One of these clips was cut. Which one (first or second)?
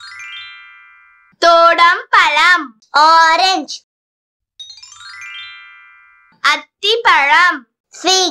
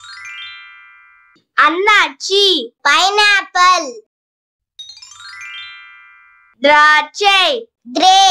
second